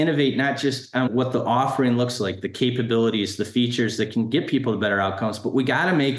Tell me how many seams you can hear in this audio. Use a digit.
1